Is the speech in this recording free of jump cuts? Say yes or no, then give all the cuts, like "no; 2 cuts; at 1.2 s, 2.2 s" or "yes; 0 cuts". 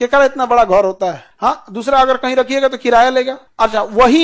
yes; 0 cuts